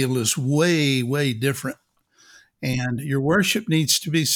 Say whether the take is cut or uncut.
uncut